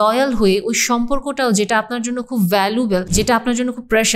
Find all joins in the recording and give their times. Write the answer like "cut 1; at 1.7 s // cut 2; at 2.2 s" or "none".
cut 1; at 3.1 s

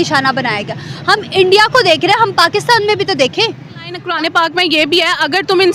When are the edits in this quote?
cut 1; at 4.0 s

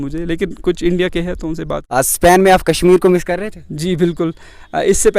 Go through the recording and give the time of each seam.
cut 1; at 1.7 s

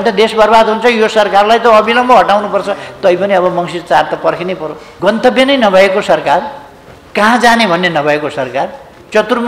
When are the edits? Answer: cut 1; at 4.8 s

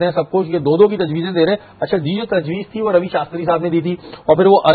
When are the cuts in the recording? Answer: none

